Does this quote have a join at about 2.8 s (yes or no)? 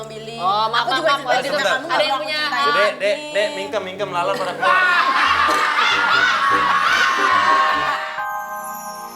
no